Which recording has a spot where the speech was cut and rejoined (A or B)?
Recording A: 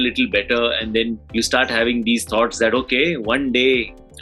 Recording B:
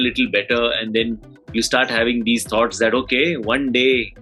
A